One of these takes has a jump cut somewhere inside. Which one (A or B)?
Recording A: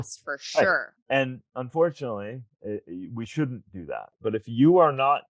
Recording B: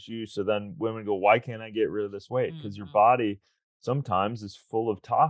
A